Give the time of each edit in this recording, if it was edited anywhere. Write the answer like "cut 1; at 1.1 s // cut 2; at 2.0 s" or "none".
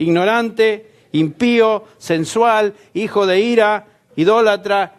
cut 1; at 1.7 s